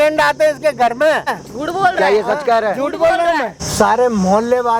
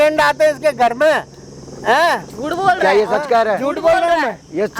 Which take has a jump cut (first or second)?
first